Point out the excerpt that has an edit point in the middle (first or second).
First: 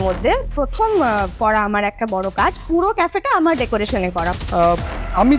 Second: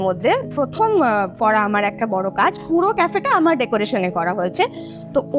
first